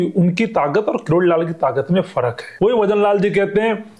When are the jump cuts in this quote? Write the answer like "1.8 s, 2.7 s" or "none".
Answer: 2.4 s